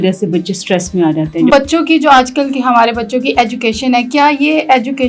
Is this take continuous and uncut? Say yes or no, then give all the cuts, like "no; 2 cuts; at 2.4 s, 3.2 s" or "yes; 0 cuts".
no; 1 cut; at 1.5 s